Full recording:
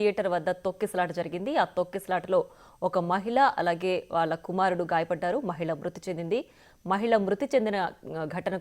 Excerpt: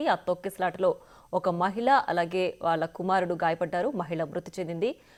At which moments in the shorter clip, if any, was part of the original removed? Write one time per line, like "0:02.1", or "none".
none